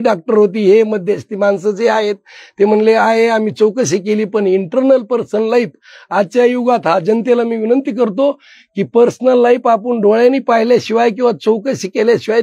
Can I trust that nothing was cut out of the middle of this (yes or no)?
yes